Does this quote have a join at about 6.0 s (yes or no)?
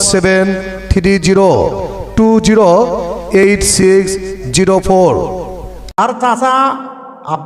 yes